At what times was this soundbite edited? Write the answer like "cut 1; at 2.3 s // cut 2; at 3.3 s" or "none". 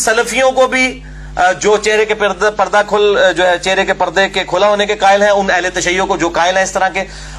none